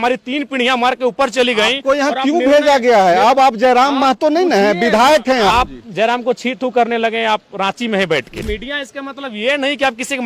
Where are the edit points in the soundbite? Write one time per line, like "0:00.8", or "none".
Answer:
0:05.5
0:08.5